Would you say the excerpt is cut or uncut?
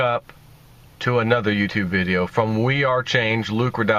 uncut